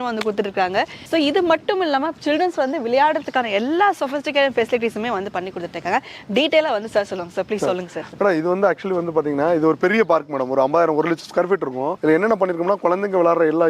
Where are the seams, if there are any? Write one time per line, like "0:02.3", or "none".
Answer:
none